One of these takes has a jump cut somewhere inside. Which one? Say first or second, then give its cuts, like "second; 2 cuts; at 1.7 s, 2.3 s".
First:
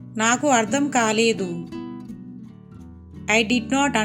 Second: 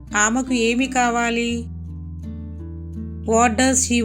first; 2 cuts; at 1.7 s, 3.2 s